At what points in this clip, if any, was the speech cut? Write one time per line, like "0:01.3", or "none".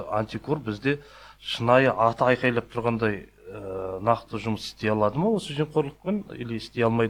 none